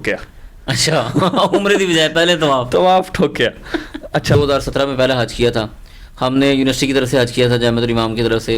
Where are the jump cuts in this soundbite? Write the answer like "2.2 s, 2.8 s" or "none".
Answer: 4.3 s